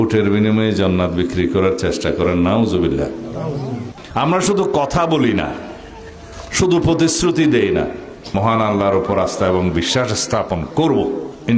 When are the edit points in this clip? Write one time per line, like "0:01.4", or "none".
0:03.8
0:08.2